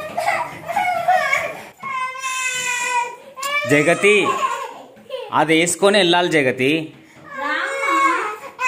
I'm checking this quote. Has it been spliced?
no; 0 cuts

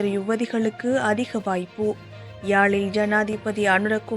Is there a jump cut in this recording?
no; 0 cuts

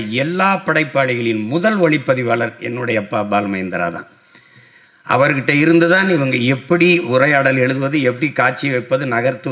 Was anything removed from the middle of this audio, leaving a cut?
no; 0 cuts

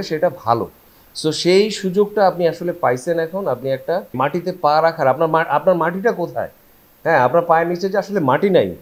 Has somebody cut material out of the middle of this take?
yes; 1 cut; at 4.1 s

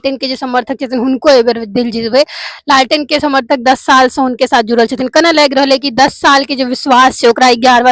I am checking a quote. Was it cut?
no; 0 cuts

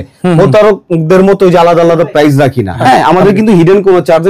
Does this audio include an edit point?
yes; 1 cut; at 2.7 s

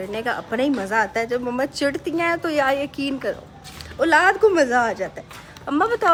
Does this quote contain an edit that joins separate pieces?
no; 0 cuts

